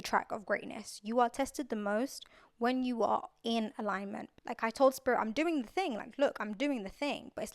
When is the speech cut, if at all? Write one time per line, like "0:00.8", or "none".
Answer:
0:04.2